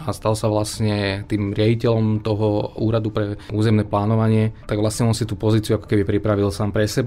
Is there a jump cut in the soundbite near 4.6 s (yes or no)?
yes